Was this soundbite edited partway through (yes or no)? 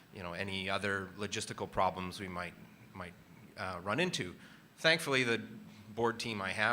yes